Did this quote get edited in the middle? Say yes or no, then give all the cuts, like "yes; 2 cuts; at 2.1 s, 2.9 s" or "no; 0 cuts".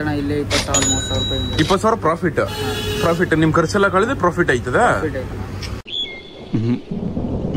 no; 0 cuts